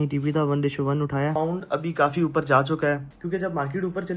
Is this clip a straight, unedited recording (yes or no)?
no